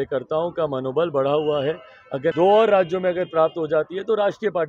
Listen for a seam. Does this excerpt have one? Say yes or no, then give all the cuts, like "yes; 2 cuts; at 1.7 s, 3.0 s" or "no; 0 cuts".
yes; 1 cut; at 2.3 s